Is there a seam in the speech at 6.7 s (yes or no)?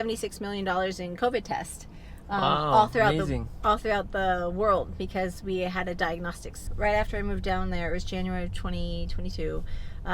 yes